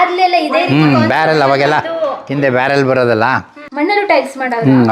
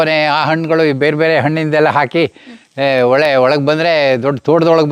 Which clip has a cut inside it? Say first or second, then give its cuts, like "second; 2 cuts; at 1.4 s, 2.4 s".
first; 1 cut; at 3.6 s